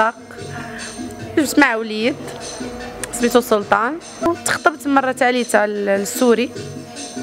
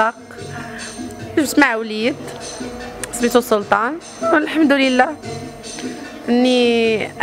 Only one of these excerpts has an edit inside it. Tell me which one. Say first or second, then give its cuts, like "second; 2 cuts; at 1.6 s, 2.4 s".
first; 1 cut; at 4.3 s